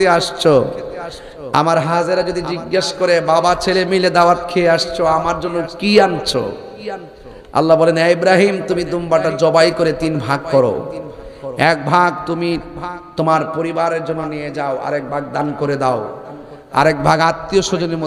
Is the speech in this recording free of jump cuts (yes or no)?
yes